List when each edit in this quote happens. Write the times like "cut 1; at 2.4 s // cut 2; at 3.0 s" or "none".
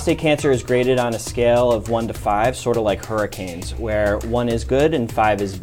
none

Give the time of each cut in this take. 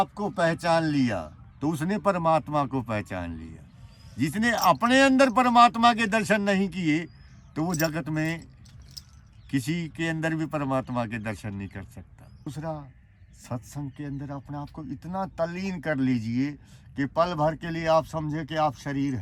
cut 1; at 12.5 s

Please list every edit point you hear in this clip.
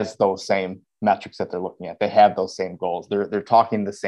none

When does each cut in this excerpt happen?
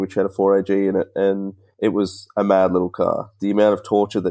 none

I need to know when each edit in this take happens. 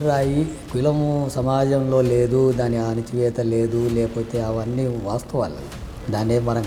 none

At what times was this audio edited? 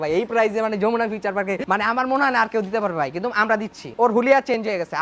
cut 1; at 1.6 s // cut 2; at 3.9 s

